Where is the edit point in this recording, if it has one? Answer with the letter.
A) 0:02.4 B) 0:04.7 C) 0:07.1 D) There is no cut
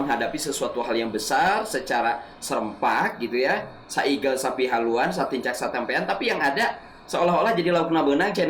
D